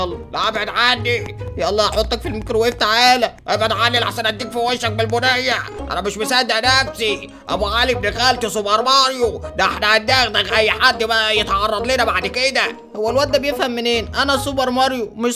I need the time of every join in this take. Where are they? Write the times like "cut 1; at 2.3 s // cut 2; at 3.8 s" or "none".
cut 1; at 5.8 s

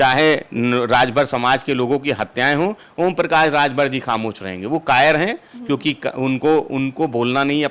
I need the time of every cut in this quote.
none

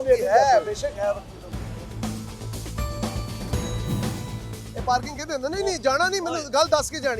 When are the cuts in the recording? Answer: cut 1; at 4.1 s

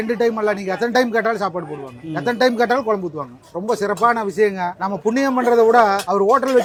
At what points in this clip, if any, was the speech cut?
none

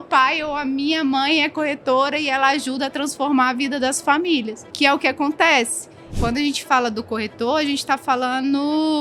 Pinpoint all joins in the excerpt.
cut 1; at 4.6 s // cut 2; at 6.0 s

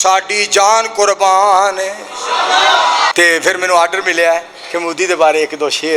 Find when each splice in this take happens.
cut 1; at 3.1 s

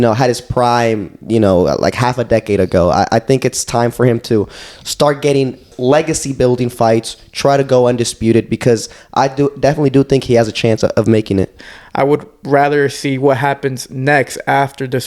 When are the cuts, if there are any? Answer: cut 1; at 5.7 s // cut 2; at 11.6 s

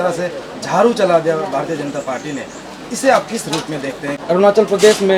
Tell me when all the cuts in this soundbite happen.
cut 1; at 4.2 s

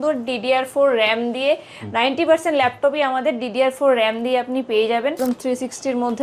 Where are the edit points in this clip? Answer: cut 1; at 5.2 s

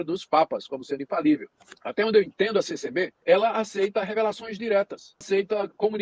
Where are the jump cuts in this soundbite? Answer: cut 1; at 1.8 s // cut 2; at 3.1 s // cut 3; at 5.2 s

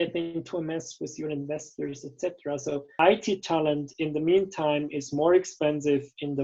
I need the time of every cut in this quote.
cut 1; at 2.9 s

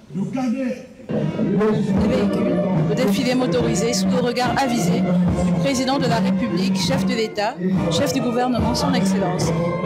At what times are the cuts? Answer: cut 1; at 1.1 s

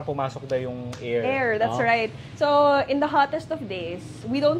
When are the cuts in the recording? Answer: none

